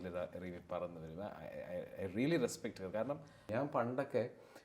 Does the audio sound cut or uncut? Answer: cut